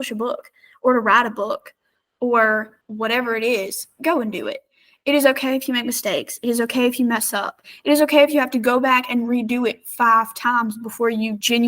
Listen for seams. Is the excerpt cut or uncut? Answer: cut